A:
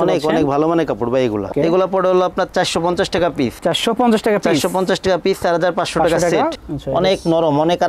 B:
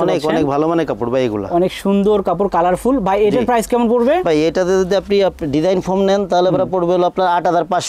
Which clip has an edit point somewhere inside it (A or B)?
A